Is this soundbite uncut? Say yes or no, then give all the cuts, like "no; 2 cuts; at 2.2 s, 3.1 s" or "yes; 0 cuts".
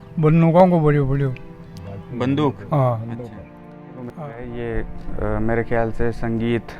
no; 1 cut; at 4.0 s